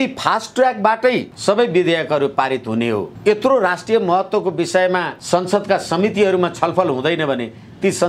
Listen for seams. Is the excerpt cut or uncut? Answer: cut